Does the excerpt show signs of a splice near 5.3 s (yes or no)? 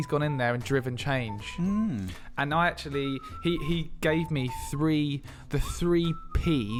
no